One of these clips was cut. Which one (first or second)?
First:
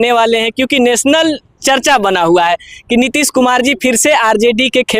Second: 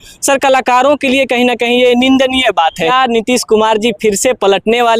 second